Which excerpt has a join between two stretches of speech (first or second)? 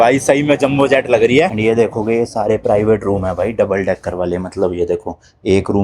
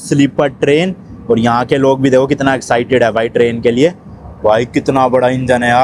first